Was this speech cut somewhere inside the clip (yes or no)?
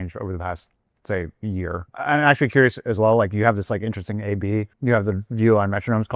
yes